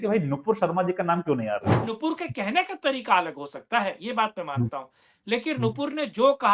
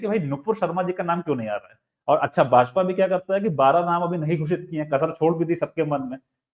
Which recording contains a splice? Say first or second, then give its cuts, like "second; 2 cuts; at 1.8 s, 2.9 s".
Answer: first; 1 cut; at 1.9 s